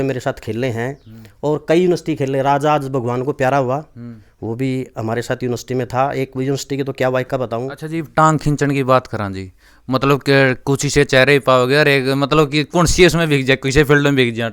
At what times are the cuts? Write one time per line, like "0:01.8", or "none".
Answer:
0:07.8